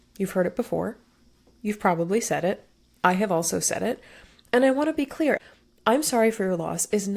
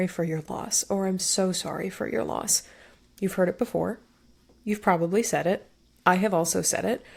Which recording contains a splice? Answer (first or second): first